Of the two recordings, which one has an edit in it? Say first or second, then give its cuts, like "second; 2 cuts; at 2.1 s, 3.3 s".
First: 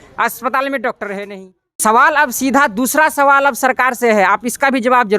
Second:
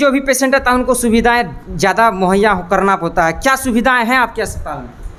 first; 1 cut; at 1.6 s